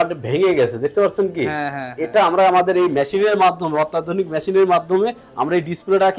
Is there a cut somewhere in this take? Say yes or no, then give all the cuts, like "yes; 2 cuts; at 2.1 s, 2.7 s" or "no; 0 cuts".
no; 0 cuts